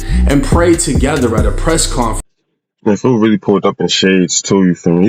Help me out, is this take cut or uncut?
cut